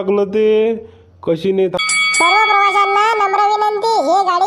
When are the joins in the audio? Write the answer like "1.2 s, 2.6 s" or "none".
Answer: 1.8 s